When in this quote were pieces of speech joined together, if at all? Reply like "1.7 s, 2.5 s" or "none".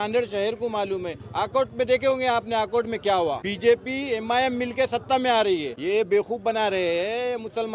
3.5 s, 5.7 s